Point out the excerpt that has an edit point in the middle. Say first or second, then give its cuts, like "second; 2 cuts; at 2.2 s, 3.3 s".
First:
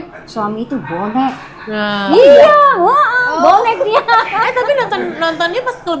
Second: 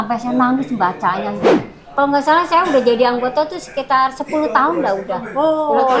second; 1 cut; at 1.6 s